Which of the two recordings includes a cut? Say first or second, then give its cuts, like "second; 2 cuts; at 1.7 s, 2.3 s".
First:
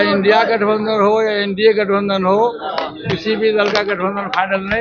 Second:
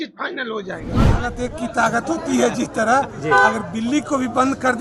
second; 1 cut; at 1.0 s